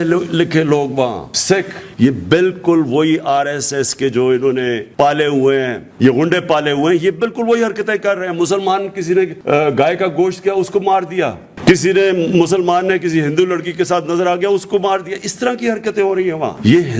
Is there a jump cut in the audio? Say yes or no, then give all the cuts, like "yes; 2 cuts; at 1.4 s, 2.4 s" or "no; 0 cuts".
yes; 4 cuts; at 1.8 s, 4.8 s, 5.8 s, 9.4 s